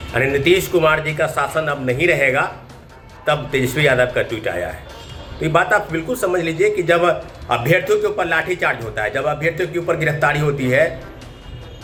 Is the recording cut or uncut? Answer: uncut